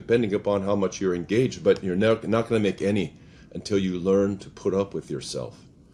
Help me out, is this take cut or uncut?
uncut